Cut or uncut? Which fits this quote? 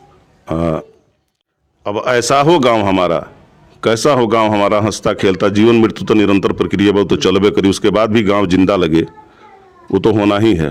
uncut